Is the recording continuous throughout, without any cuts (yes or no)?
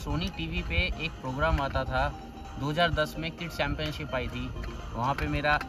yes